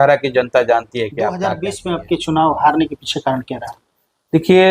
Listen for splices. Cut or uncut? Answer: cut